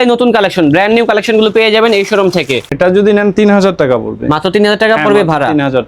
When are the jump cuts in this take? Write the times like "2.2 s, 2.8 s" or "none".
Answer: 2.7 s